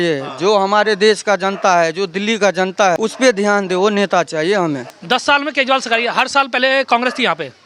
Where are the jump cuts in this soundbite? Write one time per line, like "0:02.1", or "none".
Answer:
0:03.0
0:04.9